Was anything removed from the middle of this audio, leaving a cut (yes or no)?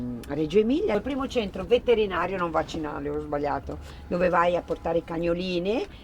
yes